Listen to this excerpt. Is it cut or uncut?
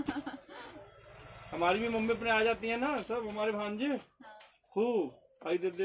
uncut